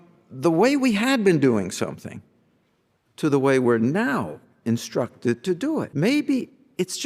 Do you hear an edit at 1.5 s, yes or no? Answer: no